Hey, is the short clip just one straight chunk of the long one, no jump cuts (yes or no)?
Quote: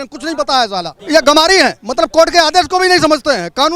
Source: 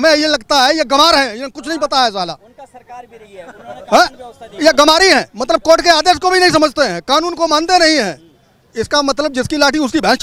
no